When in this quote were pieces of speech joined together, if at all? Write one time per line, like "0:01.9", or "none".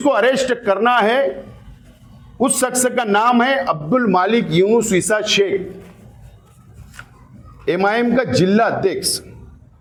none